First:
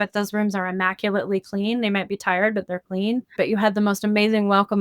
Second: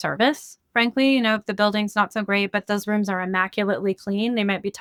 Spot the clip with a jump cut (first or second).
first